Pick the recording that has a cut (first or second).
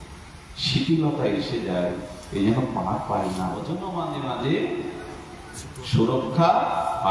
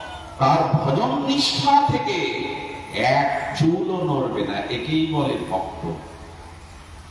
first